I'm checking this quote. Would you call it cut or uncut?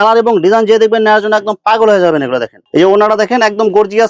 cut